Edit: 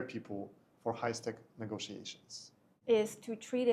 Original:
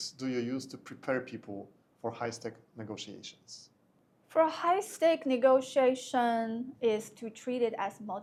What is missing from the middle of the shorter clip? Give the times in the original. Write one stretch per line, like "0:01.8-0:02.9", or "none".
0:03.9-0:06.7